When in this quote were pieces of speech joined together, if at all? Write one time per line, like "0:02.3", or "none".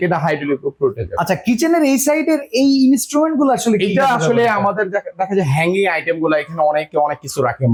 none